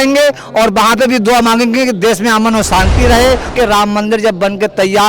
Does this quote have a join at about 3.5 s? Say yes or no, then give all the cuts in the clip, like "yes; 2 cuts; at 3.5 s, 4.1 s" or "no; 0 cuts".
yes; 1 cut; at 3.5 s